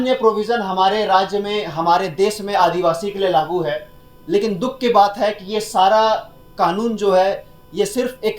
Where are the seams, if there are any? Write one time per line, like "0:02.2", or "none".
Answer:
none

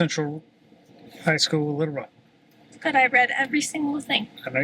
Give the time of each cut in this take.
none

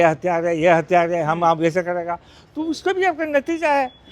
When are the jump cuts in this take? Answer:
none

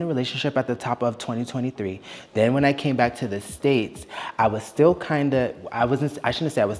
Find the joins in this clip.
none

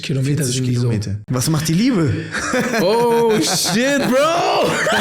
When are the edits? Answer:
0:01.2

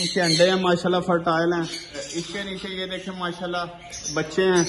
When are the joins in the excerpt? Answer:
0:02.0

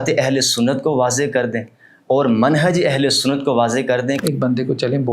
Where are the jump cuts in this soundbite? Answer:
0:04.2

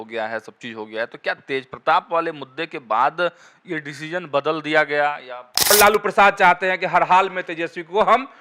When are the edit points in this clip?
0:05.7

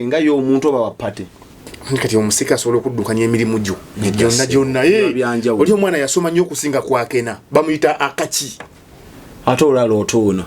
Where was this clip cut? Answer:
none

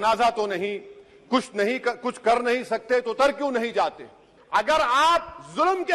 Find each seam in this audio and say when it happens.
0:04.3

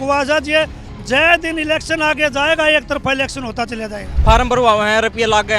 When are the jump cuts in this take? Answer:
0:04.1

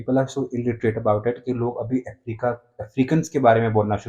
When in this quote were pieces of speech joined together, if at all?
none

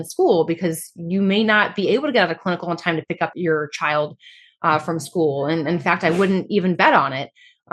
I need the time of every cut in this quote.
0:03.3

